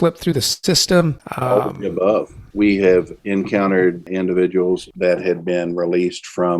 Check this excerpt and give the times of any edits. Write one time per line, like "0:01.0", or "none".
0:01.3
0:02.4
0:03.2
0:04.1
0:04.9